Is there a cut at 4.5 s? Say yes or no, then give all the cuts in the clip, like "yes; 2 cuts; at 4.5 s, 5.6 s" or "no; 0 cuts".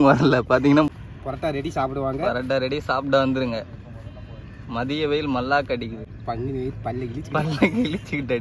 no; 2 cuts; at 0.9 s, 6.1 s